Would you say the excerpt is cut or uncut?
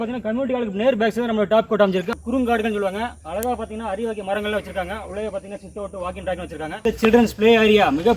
cut